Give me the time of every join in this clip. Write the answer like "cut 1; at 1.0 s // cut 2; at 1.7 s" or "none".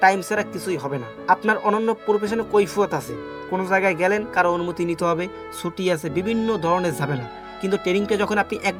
none

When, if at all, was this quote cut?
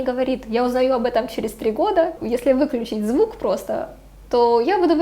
cut 1; at 2.2 s

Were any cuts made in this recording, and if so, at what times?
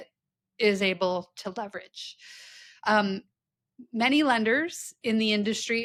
none

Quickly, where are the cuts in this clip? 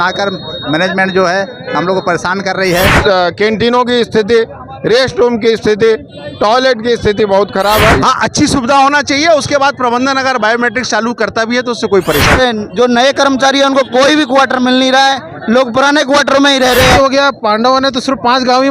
cut 1; at 3.0 s // cut 2; at 8.0 s // cut 3; at 12.4 s // cut 4; at 17.0 s

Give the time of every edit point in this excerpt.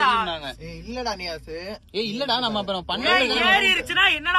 none

